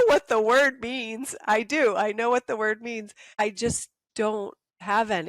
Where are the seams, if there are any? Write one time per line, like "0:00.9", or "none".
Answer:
0:03.4
0:04.4